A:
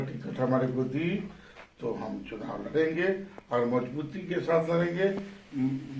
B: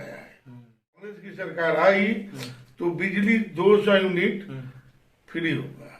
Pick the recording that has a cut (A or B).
B